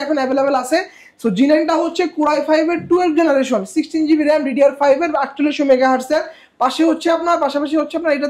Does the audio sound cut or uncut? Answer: uncut